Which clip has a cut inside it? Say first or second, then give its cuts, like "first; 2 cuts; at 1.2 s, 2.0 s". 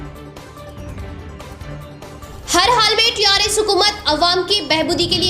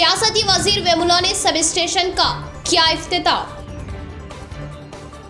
first; 1 cut; at 0.9 s